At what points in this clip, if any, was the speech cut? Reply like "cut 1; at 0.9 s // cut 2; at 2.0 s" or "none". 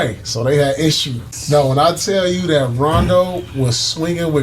cut 1; at 1.3 s